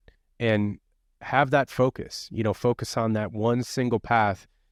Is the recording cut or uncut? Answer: uncut